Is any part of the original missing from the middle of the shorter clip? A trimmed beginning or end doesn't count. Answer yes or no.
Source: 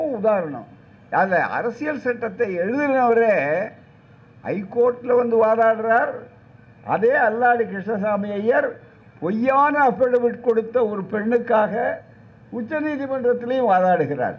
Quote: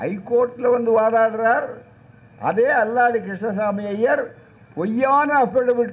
no